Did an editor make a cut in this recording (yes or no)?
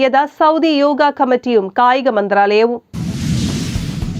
yes